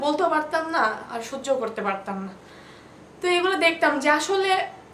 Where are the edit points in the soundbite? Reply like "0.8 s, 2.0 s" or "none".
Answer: none